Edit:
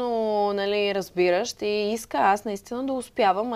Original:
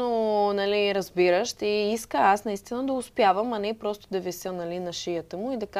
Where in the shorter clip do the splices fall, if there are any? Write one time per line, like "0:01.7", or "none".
none